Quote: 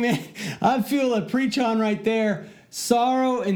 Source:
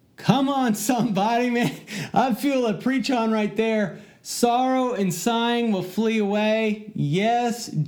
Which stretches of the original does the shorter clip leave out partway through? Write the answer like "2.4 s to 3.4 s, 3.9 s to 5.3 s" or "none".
none